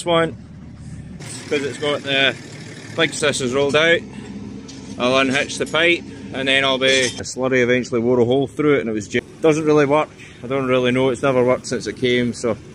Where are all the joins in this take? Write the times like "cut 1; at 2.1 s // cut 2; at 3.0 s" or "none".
cut 1; at 1.3 s // cut 2; at 3.1 s // cut 3; at 7.3 s // cut 4; at 9.1 s

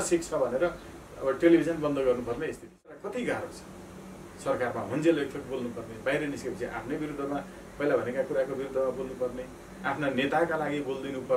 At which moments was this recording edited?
cut 1; at 3.0 s

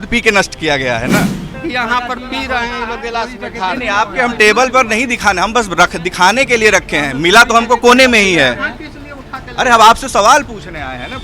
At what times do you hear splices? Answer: cut 1; at 1.5 s

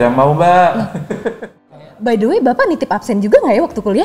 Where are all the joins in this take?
cut 1; at 1.6 s

